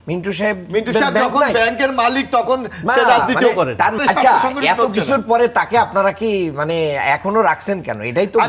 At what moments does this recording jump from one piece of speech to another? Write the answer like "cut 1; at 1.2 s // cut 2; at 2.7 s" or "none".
cut 1; at 4.0 s